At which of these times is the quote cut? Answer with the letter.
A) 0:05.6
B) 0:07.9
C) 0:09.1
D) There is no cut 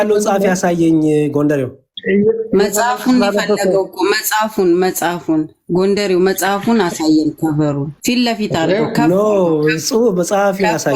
B